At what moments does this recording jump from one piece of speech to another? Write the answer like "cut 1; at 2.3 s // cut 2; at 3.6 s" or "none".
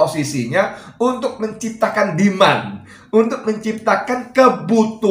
none